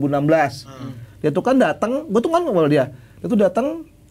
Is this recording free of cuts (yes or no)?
yes